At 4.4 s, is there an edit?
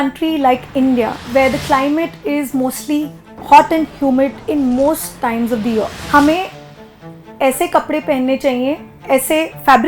yes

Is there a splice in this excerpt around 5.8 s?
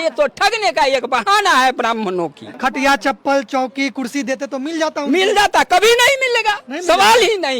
no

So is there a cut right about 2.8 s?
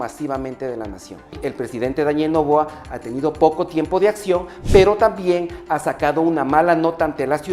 no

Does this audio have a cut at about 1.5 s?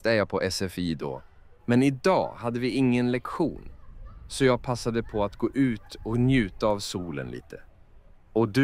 no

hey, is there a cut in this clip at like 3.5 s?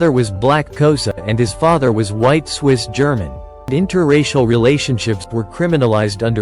yes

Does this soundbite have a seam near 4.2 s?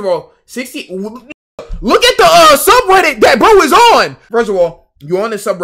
yes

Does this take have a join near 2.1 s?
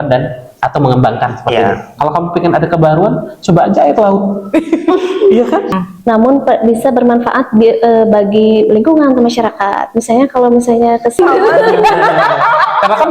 no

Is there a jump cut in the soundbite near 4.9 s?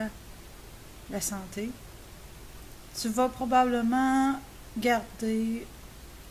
yes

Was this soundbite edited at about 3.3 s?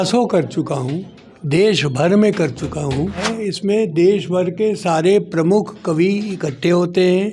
yes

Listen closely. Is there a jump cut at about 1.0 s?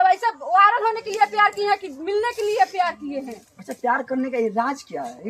no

